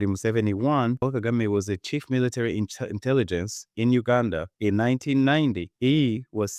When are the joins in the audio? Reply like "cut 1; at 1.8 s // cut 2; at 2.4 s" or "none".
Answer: cut 1; at 1.0 s